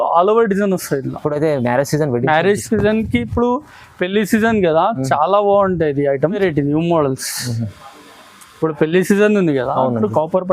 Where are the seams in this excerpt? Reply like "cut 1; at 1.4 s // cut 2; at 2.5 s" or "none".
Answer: cut 1; at 6.4 s

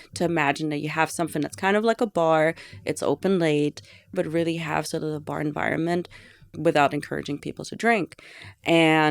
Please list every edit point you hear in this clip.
cut 1; at 4.1 s // cut 2; at 6.5 s

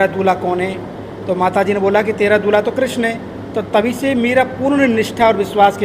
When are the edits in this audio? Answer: none

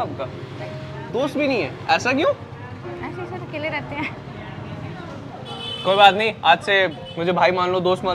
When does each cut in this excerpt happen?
none

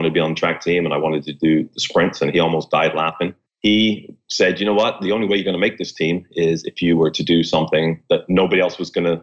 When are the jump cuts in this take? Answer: cut 1; at 3.4 s

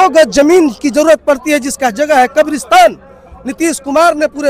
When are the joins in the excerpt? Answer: none

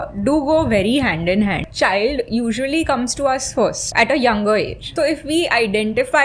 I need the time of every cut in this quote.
cut 1; at 1.6 s // cut 2; at 3.8 s // cut 3; at 4.8 s

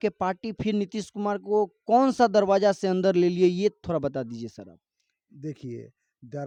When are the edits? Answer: none

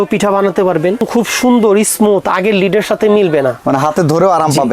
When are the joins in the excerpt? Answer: cut 1; at 1.1 s

